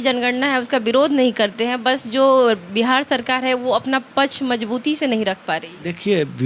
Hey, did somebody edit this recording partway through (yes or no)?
no